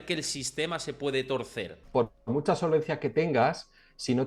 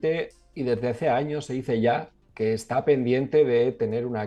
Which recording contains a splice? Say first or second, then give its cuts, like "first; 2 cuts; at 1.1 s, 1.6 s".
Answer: first; 1 cut; at 1.8 s